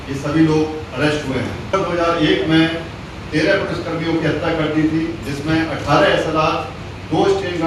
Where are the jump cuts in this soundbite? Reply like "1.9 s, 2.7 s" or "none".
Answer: 1.7 s